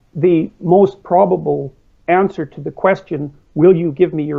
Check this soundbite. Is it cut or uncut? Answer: uncut